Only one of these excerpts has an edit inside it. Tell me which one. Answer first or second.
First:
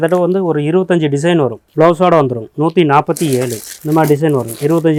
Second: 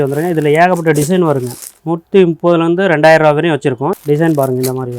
second